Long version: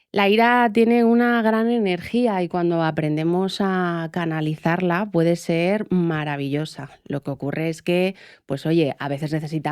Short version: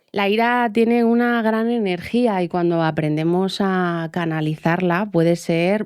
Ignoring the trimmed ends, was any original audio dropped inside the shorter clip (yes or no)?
no